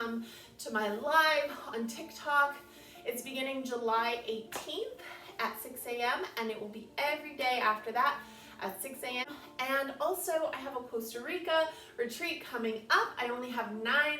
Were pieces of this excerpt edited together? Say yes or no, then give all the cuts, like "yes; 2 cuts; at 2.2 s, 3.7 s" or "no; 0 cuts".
yes; 1 cut; at 9.2 s